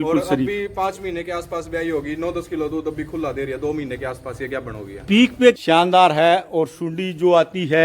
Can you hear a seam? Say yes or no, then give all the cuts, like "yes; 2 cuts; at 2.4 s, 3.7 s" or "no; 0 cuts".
yes; 1 cut; at 5.6 s